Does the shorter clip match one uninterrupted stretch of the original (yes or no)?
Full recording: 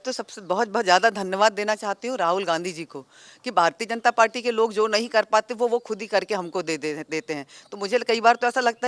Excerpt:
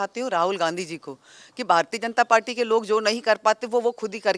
yes